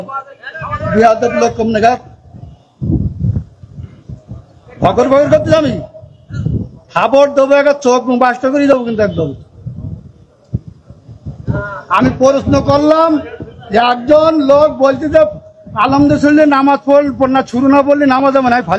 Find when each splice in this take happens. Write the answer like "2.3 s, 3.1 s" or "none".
none